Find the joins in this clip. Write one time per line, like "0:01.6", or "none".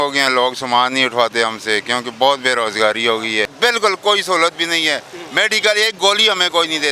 0:03.5